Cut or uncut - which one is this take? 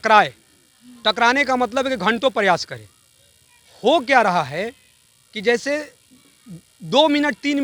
uncut